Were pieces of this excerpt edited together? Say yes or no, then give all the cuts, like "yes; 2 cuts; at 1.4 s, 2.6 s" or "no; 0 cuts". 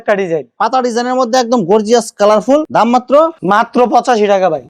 no; 0 cuts